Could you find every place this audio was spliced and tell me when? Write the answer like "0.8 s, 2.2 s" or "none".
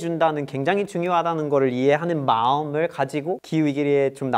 3.4 s